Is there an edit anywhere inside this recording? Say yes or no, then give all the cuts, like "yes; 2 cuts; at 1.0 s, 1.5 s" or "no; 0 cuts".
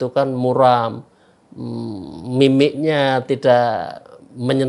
no; 0 cuts